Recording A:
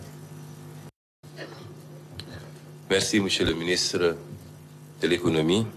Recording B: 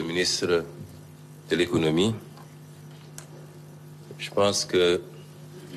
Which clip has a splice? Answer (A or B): A